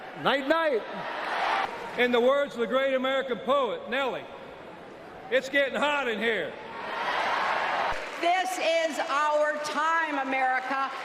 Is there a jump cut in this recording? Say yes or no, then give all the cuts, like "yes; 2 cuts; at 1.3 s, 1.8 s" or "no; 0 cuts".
yes; 2 cuts; at 1.6 s, 7.9 s